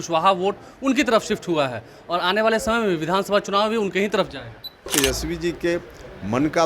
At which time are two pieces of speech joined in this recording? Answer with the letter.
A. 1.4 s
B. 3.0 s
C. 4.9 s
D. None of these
C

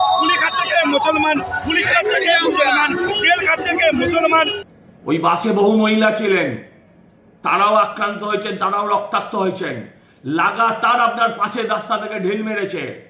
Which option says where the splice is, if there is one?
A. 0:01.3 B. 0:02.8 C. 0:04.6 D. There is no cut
C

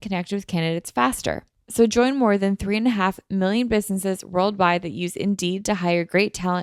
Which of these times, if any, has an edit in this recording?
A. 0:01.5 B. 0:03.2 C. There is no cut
A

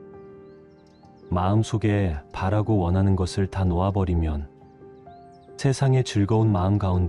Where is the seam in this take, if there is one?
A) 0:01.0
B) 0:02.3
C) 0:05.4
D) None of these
A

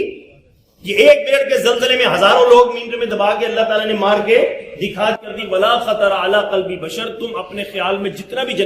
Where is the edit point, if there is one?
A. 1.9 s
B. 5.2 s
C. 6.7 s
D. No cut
B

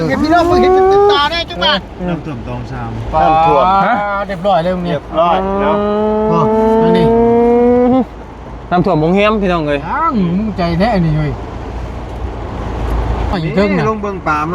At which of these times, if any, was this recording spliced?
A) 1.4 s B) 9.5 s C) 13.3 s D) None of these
C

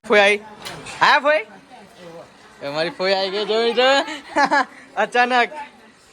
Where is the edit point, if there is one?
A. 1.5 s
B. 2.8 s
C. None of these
C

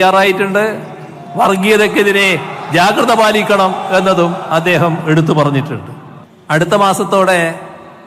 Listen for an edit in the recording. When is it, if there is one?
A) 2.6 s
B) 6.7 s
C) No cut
B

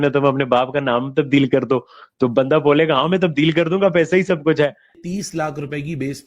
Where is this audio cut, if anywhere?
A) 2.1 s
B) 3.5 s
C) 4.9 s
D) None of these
C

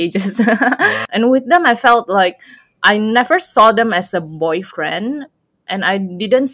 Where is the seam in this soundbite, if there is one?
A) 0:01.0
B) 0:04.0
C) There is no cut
A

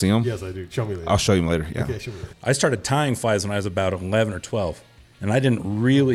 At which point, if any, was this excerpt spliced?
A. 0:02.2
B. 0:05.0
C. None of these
A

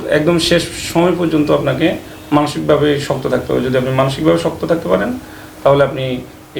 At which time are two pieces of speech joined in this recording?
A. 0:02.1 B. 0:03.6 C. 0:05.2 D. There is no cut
D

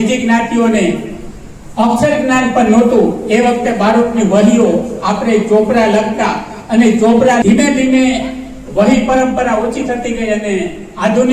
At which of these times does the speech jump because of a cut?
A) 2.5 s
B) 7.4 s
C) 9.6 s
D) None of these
B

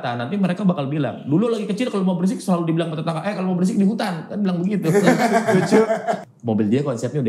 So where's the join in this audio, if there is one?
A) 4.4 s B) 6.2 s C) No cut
B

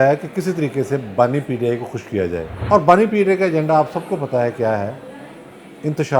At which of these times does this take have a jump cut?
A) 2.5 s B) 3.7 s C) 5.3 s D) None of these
A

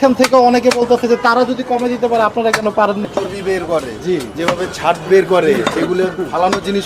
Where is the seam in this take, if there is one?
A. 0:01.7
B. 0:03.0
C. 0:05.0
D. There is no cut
B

